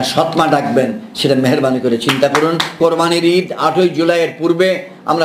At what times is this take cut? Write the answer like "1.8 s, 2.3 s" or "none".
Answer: 2.8 s